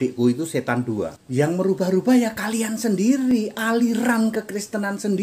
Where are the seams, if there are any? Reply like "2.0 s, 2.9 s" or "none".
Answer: none